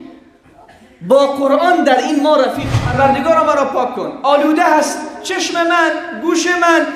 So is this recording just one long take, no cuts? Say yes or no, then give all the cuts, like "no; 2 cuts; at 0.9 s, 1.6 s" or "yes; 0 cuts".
no; 1 cut; at 2.9 s